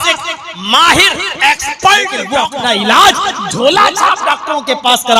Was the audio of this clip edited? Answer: yes; 1 cut; at 2.2 s

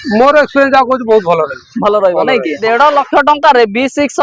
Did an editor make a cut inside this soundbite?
yes; 1 cut; at 2.6 s

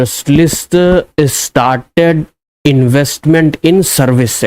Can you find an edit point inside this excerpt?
no; 0 cuts

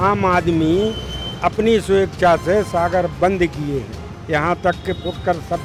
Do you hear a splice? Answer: no; 0 cuts

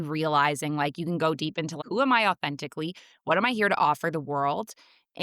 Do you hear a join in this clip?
yes; 1 cut; at 1.8 s

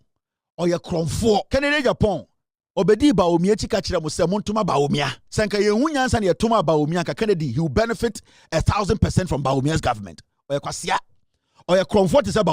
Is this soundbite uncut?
no; 2 cuts; at 1.5 s, 5.2 s

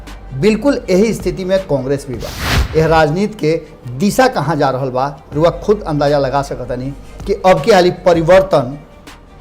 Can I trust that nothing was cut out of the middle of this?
no; 1 cut; at 2.5 s

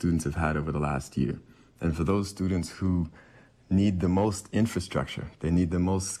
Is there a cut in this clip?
no; 0 cuts

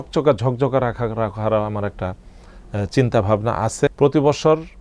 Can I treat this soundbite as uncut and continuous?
no; 1 cut; at 3.9 s

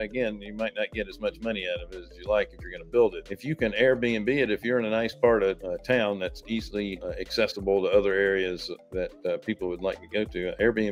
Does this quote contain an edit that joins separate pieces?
yes; 3 cuts; at 3.3 s, 5.6 s, 7.0 s

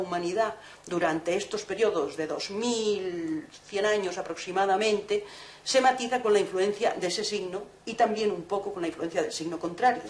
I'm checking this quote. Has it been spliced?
no; 0 cuts

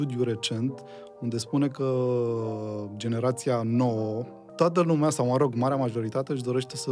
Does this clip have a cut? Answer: yes; 1 cut; at 4.4 s

